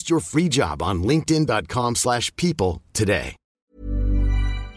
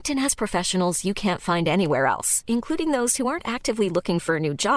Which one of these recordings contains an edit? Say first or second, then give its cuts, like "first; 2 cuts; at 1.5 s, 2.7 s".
first; 1 cut; at 3.7 s